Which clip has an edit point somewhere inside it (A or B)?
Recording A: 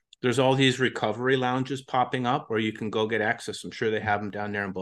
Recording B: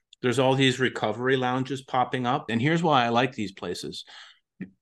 B